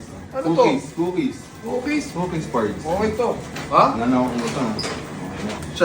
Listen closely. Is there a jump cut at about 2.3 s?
no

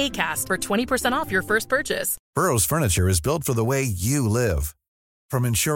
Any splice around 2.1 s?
yes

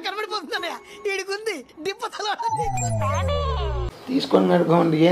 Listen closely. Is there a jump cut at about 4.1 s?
yes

